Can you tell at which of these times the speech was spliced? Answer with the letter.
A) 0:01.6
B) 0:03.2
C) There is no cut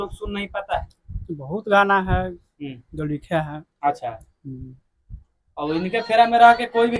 C